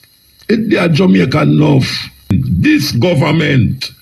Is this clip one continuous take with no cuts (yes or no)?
no